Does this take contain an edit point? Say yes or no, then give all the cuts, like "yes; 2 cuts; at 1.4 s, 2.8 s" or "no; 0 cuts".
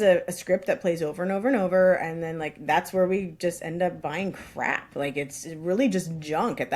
no; 0 cuts